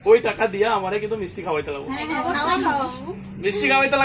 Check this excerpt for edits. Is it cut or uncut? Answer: uncut